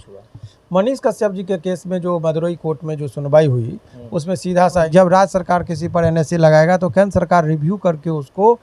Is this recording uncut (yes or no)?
no